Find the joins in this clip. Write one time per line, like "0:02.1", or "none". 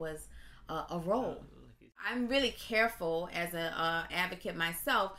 0:02.0